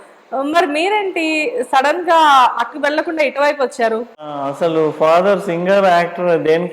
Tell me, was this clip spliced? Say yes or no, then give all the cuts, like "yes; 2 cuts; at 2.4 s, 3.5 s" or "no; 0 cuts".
yes; 1 cut; at 4.4 s